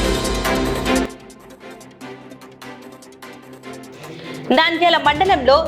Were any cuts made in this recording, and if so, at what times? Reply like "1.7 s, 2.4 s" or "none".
1.1 s, 3.9 s